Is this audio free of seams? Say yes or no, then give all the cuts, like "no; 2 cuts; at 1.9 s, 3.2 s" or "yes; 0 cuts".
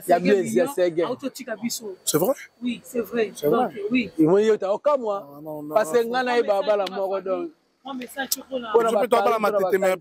yes; 0 cuts